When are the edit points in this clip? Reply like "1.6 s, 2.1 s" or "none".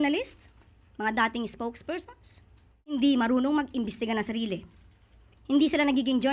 2.9 s